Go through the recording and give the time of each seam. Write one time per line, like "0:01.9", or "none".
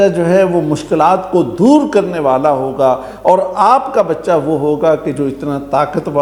none